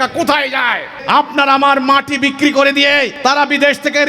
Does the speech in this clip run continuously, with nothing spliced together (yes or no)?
no